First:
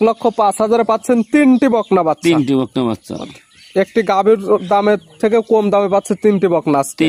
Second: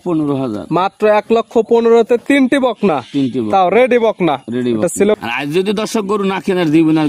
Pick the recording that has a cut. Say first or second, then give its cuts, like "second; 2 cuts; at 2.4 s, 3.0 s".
second; 1 cut; at 5.2 s